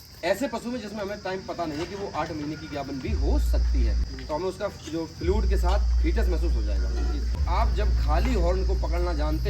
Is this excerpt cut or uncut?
cut